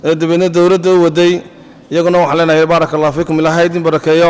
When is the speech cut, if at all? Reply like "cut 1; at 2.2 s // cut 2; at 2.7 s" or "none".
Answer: none